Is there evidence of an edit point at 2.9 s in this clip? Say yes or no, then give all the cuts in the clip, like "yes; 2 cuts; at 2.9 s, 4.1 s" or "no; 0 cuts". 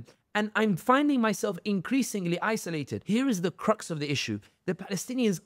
yes; 1 cut; at 2.9 s